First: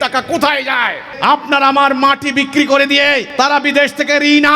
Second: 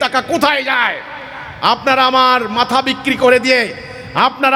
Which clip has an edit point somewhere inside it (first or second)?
first